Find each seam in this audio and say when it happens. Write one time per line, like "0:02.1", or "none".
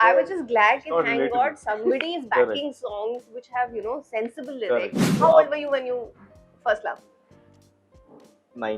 0:05.0

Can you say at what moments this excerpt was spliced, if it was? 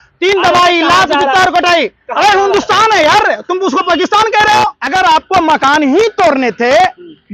0:04.8

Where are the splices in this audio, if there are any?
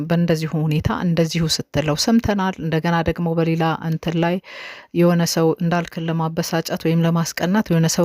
0:02.8

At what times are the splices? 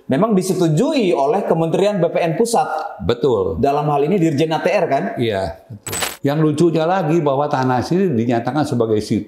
0:06.0

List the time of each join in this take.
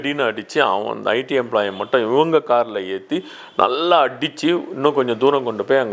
none

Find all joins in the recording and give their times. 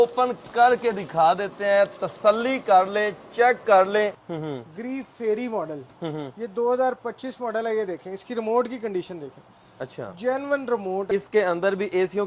0:04.2
0:11.1

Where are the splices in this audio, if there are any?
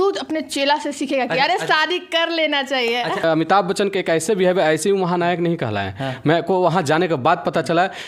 0:03.2

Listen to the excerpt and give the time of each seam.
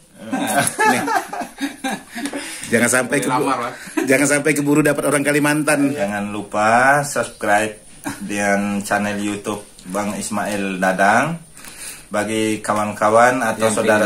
0:06.0

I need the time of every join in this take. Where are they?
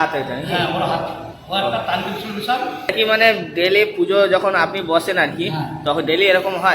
0:02.9

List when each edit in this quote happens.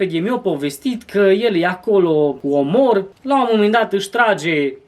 0:02.4
0:03.1

